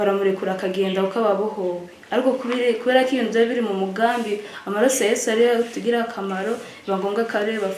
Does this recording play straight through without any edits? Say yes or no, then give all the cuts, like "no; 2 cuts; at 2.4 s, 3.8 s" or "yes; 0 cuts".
yes; 0 cuts